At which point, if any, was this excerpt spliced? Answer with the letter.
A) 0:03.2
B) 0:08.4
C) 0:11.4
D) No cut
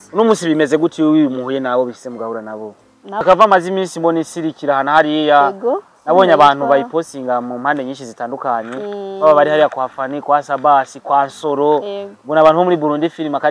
A